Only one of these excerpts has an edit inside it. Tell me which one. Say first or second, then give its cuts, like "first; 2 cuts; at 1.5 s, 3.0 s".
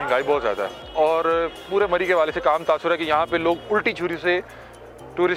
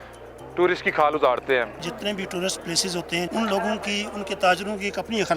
second; 2 cuts; at 1.8 s, 3.3 s